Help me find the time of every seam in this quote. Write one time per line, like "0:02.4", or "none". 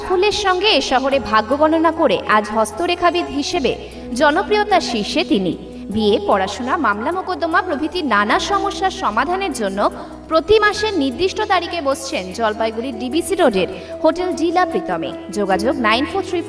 none